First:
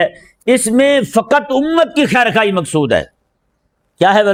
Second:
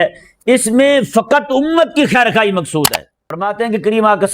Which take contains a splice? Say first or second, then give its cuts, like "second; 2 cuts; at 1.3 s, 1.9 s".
second; 1 cut; at 2.9 s